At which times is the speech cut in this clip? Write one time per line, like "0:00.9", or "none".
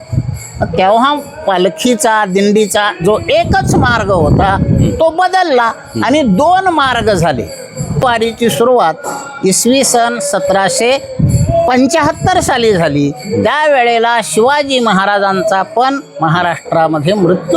0:08.0